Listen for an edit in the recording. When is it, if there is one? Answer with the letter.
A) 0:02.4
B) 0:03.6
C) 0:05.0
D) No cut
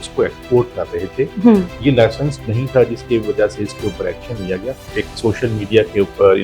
C